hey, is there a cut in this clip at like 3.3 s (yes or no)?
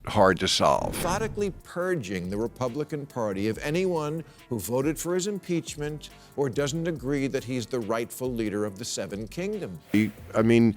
no